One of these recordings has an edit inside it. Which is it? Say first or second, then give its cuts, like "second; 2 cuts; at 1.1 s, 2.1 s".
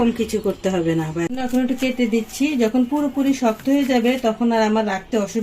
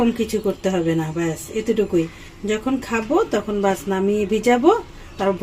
first; 1 cut; at 1.3 s